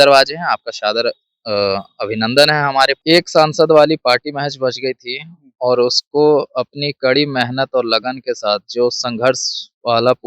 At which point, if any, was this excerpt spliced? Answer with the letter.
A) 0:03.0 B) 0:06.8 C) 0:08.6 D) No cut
A